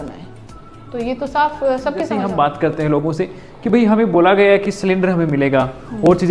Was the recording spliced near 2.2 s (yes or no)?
yes